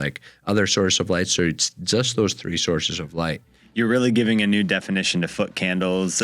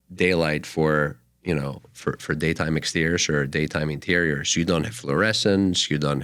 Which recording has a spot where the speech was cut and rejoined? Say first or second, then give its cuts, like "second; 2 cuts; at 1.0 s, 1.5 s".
first; 1 cut; at 3.7 s